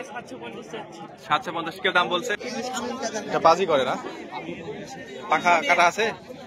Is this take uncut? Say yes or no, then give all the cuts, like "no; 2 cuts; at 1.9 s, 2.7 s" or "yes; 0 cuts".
no; 1 cut; at 2.2 s